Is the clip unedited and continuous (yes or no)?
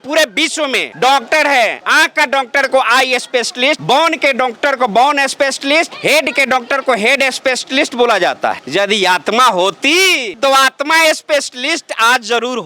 yes